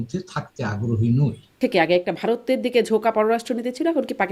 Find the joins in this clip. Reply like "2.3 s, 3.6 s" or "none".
1.5 s